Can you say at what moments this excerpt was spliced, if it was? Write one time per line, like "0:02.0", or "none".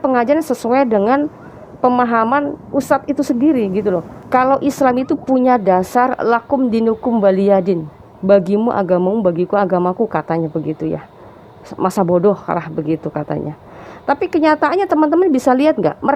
0:04.1